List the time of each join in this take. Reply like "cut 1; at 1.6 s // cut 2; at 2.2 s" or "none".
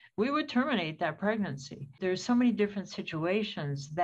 cut 1; at 2.0 s